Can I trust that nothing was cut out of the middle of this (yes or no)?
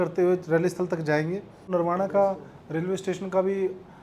no